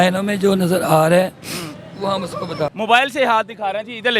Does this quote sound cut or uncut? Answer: cut